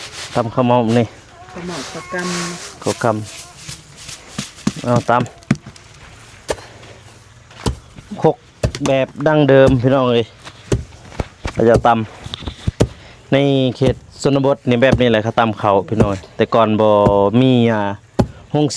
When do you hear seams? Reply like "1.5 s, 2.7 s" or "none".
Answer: none